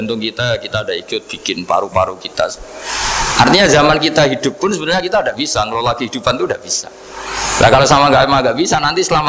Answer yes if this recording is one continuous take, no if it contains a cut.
yes